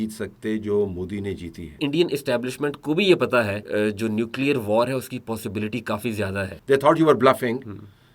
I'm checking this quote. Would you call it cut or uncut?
cut